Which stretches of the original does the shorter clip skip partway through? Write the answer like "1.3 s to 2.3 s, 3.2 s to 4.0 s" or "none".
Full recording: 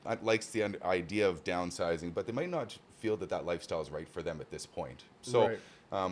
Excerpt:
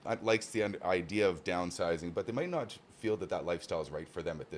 none